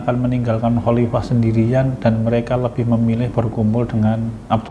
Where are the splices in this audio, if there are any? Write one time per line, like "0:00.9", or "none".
none